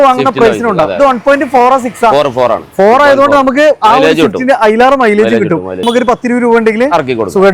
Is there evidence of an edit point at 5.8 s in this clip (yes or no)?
yes